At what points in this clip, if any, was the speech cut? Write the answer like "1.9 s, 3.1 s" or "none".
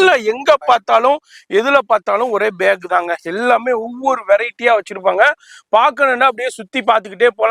none